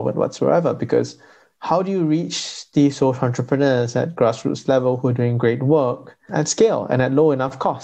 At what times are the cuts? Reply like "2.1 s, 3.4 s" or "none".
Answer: 6.3 s